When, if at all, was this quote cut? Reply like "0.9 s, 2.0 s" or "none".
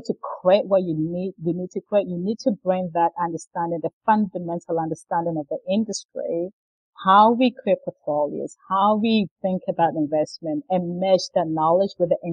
none